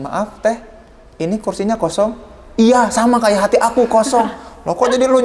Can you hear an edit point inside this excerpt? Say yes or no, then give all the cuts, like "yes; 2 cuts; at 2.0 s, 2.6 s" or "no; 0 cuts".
no; 0 cuts